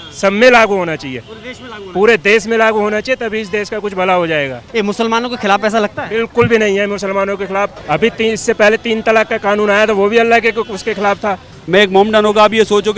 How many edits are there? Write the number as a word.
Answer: three